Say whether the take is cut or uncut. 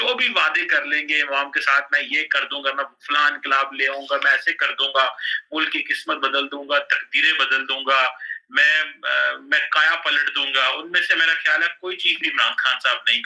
uncut